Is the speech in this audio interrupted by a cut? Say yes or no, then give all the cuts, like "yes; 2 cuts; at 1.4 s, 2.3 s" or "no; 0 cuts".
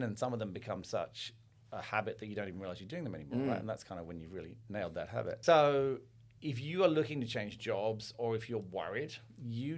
yes; 1 cut; at 5.4 s